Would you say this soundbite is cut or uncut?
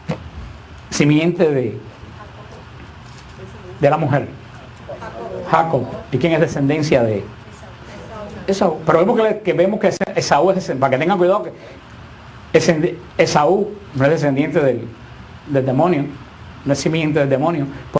cut